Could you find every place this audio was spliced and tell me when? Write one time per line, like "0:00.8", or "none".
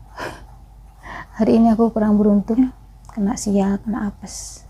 none